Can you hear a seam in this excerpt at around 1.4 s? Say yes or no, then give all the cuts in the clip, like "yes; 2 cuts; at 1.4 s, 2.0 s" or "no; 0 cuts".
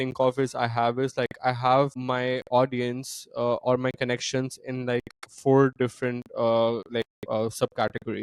no; 0 cuts